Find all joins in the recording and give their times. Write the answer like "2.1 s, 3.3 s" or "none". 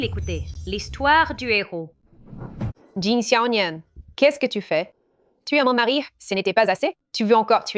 2.7 s